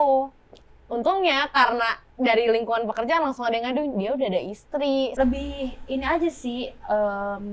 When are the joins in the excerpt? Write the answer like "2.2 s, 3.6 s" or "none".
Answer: 5.1 s